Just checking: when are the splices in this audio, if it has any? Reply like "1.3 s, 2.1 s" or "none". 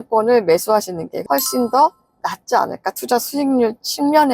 1.1 s